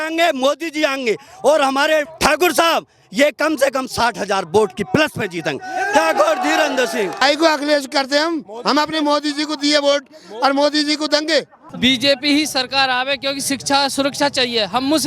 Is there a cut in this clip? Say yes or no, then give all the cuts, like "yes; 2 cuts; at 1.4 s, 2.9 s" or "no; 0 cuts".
yes; 3 cuts; at 2.1 s, 7.2 s, 11.6 s